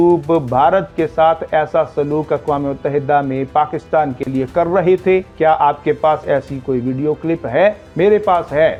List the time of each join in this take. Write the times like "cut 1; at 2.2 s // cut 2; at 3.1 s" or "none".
none